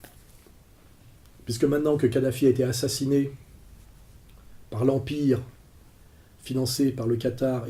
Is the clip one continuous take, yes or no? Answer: yes